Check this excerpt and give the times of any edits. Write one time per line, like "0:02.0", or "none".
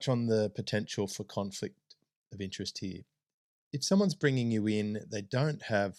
none